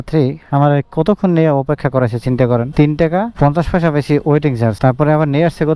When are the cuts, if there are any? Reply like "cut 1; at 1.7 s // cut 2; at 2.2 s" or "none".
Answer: none